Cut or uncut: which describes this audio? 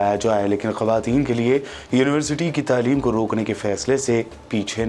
uncut